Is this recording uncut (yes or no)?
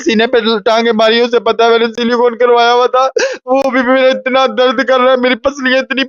yes